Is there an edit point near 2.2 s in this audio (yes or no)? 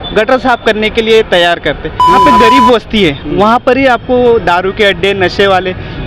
yes